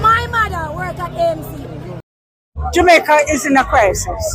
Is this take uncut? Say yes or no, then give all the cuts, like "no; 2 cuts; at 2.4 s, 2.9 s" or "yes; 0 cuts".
no; 1 cut; at 2.0 s